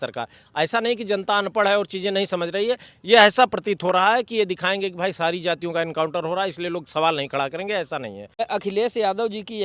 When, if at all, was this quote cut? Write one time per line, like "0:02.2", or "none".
0:08.2